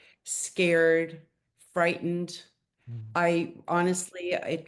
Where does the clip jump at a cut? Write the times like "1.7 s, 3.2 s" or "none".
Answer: none